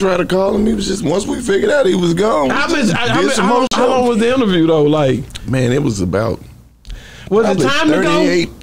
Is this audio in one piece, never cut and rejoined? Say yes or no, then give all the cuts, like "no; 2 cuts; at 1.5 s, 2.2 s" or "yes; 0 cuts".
no; 1 cut; at 2.7 s